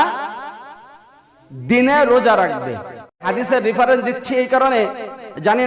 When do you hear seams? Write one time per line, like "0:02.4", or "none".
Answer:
0:03.2